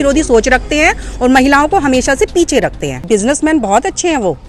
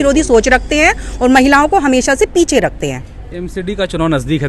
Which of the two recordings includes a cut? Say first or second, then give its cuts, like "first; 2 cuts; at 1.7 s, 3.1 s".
first; 1 cut; at 3.0 s